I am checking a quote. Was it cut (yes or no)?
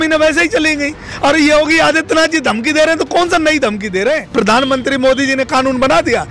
yes